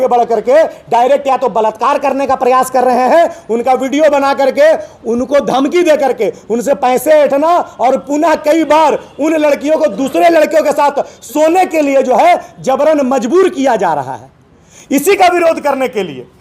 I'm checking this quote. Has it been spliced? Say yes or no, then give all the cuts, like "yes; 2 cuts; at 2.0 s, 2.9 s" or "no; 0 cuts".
no; 0 cuts